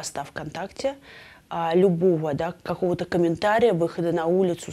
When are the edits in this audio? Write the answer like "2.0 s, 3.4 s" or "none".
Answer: none